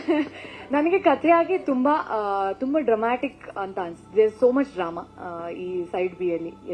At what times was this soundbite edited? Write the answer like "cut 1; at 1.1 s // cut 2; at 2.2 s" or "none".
none